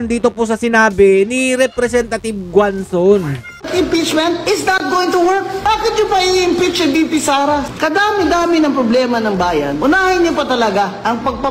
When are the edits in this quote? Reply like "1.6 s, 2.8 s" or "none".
3.5 s, 7.7 s